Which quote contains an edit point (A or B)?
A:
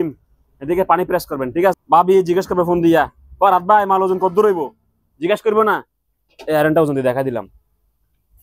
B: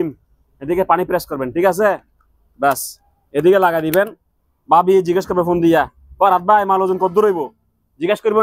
A